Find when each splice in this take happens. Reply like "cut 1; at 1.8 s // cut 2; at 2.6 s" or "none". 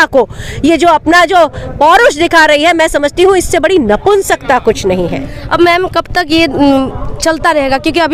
none